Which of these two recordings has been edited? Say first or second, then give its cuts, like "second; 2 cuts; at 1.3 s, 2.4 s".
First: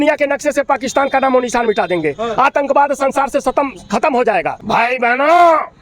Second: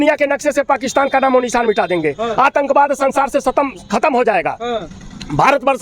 first; 1 cut; at 4.6 s